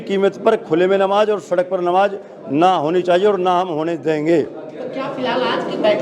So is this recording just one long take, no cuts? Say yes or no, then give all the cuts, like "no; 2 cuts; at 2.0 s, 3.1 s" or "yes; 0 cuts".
yes; 0 cuts